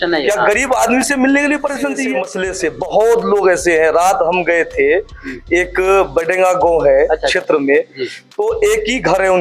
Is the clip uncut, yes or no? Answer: no